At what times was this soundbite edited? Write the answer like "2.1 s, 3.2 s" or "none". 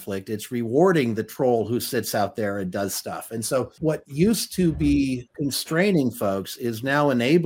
3.7 s, 5.3 s